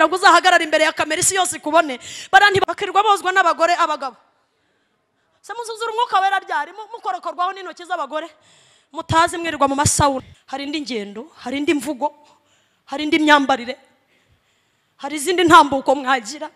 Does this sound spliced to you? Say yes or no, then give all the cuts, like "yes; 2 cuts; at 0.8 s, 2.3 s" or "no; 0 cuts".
yes; 2 cuts; at 2.6 s, 10.4 s